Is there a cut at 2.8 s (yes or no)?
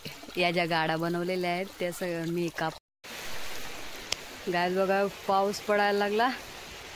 yes